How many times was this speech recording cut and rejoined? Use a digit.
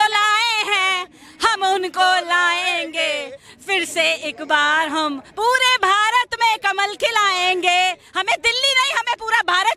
0